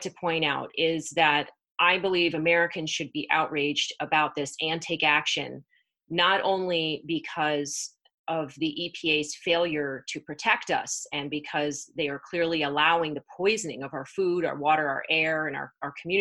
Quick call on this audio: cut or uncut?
uncut